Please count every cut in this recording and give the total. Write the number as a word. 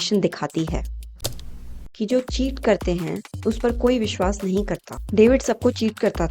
two